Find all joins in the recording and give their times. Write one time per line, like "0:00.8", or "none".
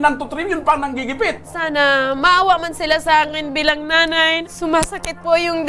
0:01.4
0:04.4

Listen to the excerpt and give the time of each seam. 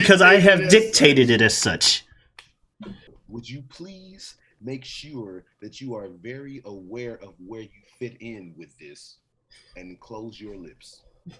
0:03.2

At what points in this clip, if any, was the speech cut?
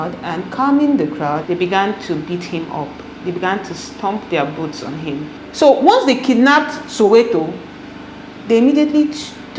0:01.4
0:05.4

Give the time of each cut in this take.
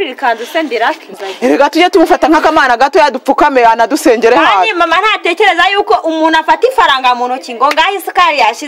0:01.1

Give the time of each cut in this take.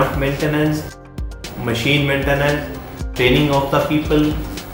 0:01.0
0:03.1

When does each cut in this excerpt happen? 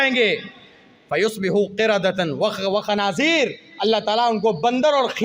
none

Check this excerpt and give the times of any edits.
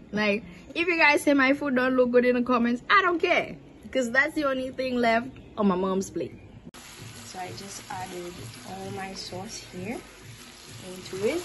0:06.5

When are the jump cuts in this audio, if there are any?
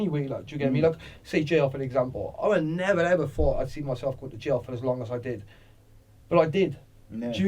none

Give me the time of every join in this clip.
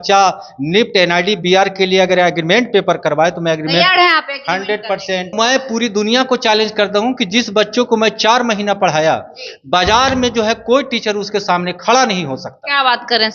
0:05.3

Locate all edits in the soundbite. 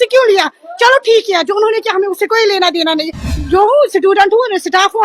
0:03.4

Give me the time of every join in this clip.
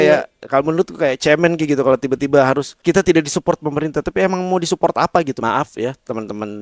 0:02.8
0:05.3

